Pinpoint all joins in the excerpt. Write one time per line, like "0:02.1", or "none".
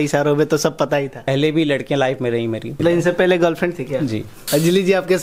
0:01.3
0:02.7
0:04.3